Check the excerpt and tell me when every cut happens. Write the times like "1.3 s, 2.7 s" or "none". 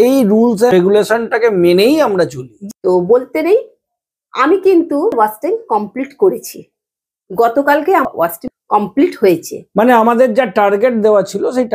0.7 s, 2.5 s, 5.1 s, 8.1 s